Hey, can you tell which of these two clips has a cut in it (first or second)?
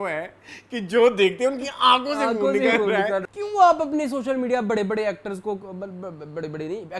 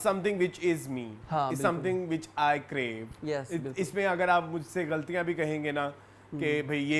first